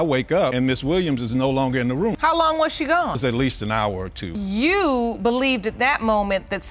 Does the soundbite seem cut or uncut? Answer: uncut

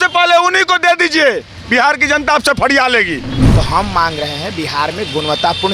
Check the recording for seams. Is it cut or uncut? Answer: cut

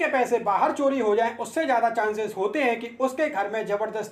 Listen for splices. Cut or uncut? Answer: uncut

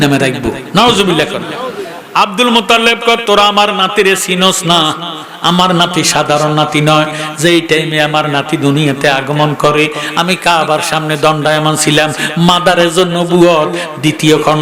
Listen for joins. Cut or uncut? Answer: uncut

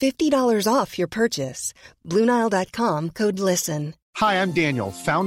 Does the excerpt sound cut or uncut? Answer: uncut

